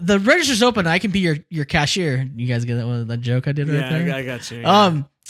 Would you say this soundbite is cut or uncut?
uncut